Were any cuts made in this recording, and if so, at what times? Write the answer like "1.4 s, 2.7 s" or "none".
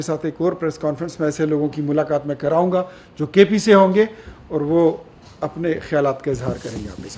none